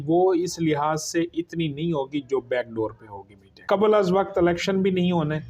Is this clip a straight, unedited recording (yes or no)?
no